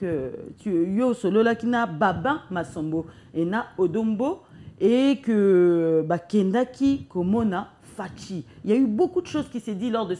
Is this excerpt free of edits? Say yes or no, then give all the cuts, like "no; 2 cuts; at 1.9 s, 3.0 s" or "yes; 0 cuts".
yes; 0 cuts